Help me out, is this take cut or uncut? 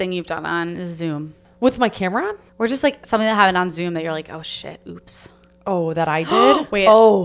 cut